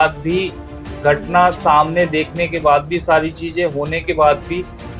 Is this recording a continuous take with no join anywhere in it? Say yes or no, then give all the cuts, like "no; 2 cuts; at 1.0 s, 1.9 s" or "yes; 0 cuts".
yes; 0 cuts